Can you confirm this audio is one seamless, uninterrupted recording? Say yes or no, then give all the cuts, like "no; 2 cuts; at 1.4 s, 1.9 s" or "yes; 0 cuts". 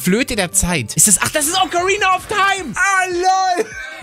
yes; 0 cuts